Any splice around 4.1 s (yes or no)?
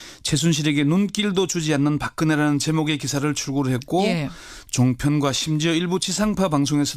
no